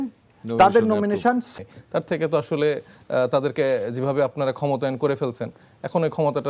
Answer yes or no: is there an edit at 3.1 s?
no